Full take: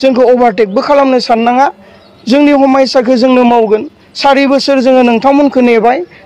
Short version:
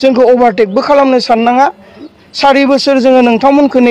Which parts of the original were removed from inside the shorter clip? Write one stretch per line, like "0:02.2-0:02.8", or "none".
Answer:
0:02.1-0:03.9